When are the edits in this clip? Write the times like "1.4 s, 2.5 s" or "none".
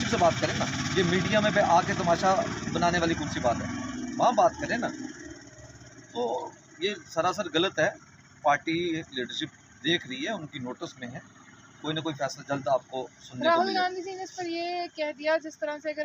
none